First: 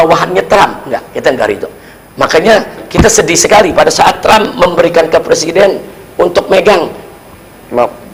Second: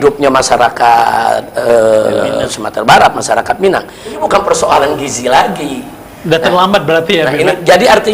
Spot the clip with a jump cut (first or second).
second